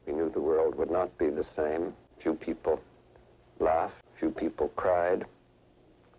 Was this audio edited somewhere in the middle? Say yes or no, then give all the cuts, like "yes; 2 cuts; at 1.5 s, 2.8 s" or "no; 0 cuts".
yes; 2 cuts; at 2.1 s, 4.0 s